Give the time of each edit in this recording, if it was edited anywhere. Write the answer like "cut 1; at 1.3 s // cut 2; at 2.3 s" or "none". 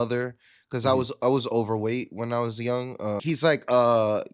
cut 1; at 3.2 s